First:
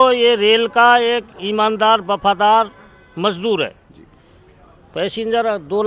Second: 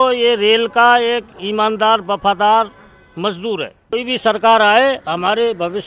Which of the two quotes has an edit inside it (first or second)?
second